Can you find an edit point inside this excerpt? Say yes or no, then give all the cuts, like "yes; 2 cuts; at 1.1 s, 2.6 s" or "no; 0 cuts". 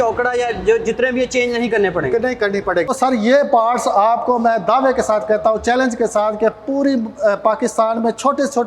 yes; 1 cut; at 2.9 s